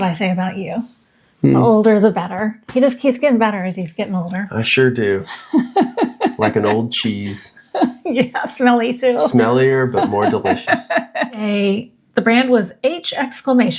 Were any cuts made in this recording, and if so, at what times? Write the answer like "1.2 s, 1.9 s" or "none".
11.4 s